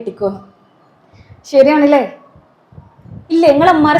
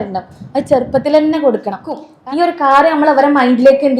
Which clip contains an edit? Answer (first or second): second